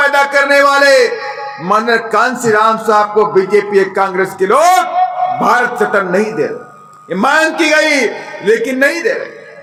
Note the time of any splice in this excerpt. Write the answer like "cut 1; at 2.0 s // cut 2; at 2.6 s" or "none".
none

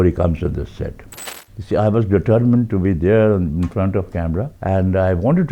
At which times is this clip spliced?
cut 1; at 1.1 s // cut 2; at 4.5 s

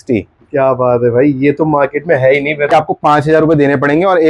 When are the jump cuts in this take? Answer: cut 1; at 2.7 s

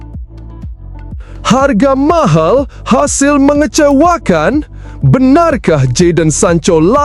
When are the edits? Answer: cut 1; at 1.1 s

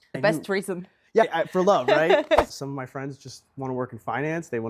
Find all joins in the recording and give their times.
cut 1; at 2.5 s

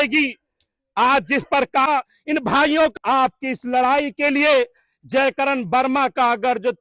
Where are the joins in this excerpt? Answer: cut 1; at 1.9 s // cut 2; at 2.9 s

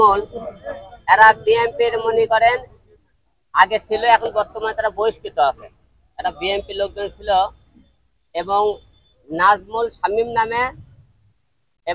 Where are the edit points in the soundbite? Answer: none

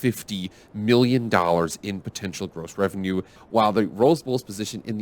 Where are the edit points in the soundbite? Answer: cut 1; at 3.4 s

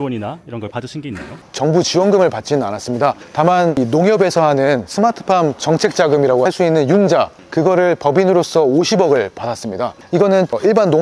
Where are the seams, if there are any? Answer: none

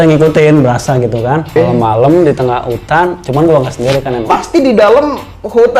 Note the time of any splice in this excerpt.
cut 1; at 1.6 s // cut 2; at 4.2 s

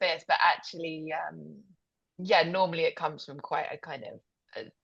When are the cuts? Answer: none

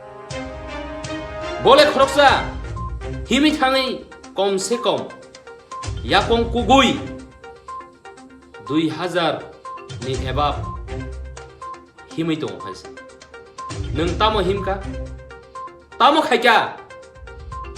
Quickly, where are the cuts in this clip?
cut 1; at 0.9 s

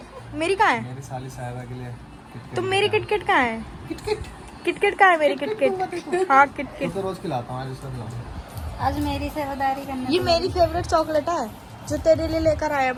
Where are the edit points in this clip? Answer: none

